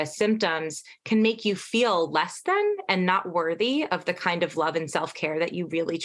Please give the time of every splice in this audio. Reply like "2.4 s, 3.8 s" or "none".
none

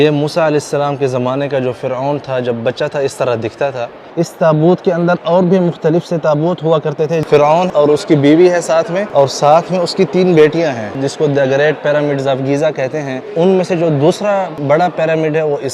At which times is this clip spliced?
4.0 s, 7.7 s, 9.0 s, 11.0 s, 13.2 s, 14.5 s

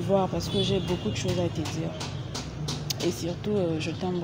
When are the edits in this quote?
none

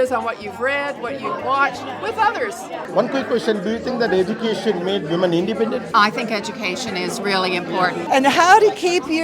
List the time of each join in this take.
2.8 s, 5.9 s, 8.0 s

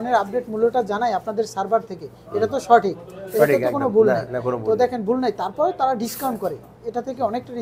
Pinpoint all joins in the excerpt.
none

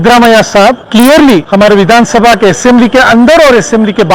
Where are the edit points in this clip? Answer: 0.8 s, 1.5 s

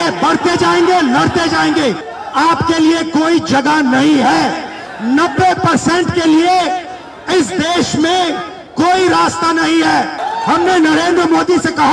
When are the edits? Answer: 2.1 s, 10.2 s

